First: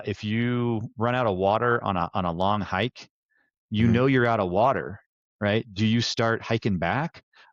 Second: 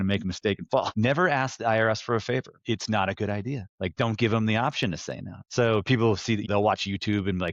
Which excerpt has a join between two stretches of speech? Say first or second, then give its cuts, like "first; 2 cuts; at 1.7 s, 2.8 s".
second; 5 cuts; at 0.9 s, 2.5 s, 3.7 s, 5.4 s, 6.5 s